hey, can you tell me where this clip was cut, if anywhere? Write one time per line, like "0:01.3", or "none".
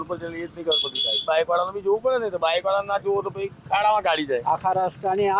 0:01.2
0:04.4